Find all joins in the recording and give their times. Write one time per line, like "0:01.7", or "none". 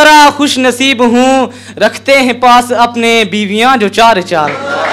none